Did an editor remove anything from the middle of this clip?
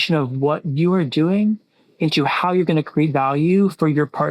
no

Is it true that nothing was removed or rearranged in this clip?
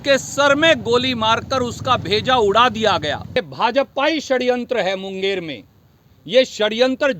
no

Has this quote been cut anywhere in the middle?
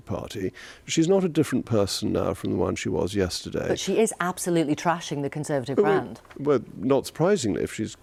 no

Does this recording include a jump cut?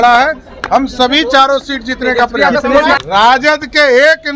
yes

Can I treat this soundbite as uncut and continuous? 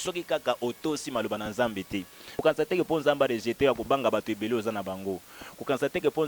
no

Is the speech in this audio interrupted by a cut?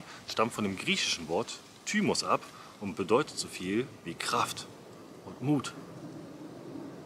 no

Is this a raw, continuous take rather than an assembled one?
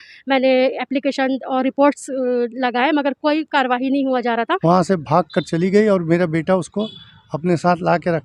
no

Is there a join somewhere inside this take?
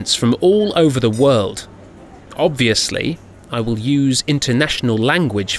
yes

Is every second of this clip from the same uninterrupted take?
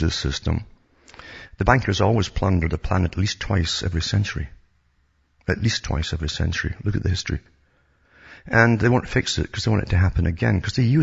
yes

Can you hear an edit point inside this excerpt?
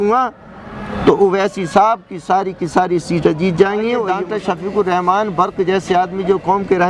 yes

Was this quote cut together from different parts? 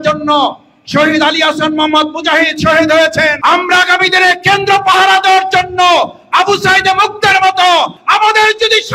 yes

